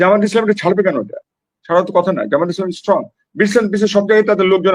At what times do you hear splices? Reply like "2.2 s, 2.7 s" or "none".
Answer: none